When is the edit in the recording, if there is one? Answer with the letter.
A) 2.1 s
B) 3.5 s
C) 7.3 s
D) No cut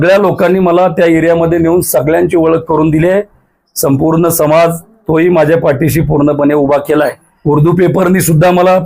C